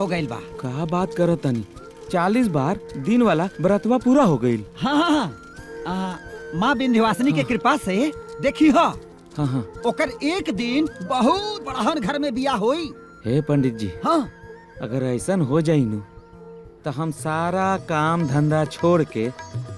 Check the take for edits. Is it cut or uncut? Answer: uncut